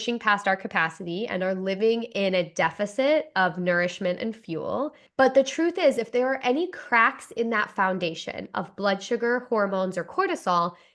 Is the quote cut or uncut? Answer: cut